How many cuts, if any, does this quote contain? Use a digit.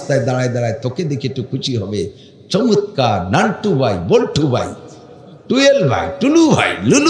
0